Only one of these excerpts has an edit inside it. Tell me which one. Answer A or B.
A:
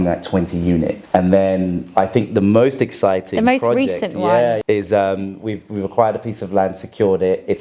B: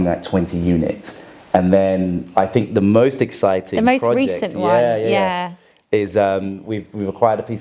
A